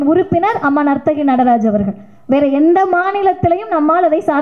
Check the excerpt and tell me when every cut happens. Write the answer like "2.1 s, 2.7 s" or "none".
none

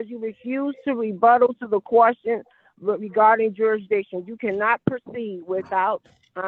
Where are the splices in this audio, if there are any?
none

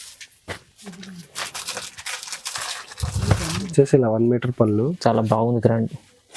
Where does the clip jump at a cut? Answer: 3.7 s

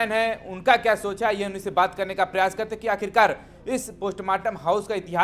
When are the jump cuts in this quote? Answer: none

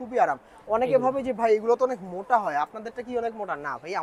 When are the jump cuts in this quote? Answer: none

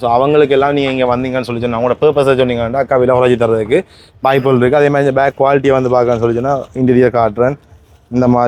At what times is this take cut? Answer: none

